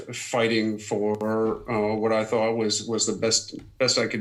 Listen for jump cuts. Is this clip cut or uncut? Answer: uncut